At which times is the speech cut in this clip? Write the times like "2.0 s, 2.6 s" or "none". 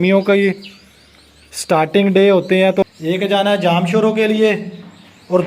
2.9 s